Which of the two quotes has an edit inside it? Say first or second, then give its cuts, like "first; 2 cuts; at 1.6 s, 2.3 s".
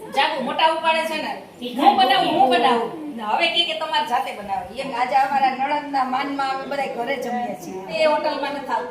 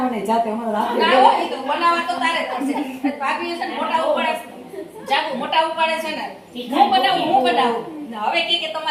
first; 2 cuts; at 4.9 s, 7.9 s